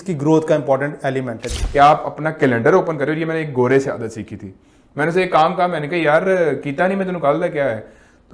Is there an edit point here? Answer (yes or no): yes